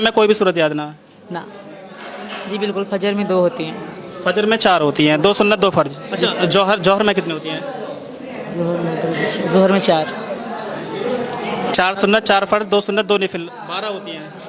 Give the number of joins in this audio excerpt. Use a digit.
2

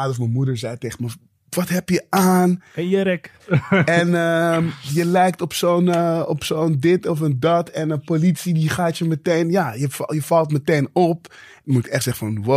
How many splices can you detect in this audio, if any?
2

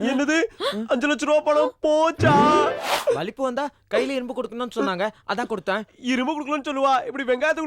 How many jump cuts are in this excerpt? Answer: 1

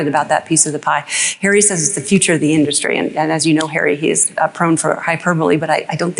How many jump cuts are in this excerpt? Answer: 0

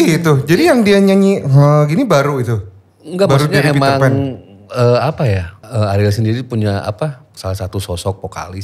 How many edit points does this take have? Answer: 2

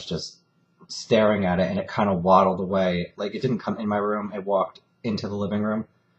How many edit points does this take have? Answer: 1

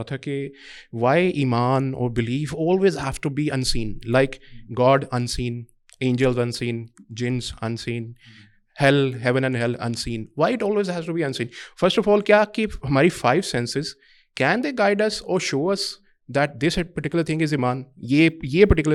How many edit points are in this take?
0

